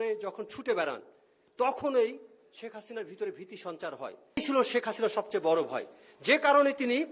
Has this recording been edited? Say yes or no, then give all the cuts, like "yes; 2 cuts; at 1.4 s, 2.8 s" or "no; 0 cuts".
yes; 1 cut; at 4.4 s